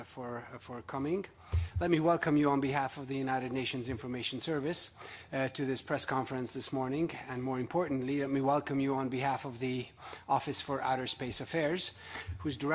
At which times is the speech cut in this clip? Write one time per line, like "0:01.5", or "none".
none